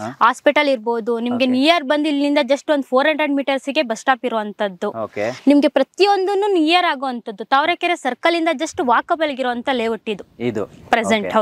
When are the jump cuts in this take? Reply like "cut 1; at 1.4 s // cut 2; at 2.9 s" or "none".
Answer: none